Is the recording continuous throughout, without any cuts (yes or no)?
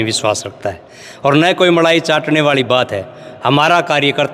yes